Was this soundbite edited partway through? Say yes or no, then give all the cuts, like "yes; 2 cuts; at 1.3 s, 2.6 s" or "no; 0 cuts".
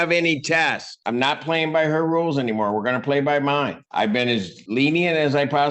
yes; 2 cuts; at 1.0 s, 4.2 s